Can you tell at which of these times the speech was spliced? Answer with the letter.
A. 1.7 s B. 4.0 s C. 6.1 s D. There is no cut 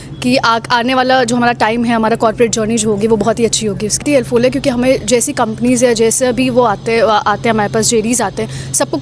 B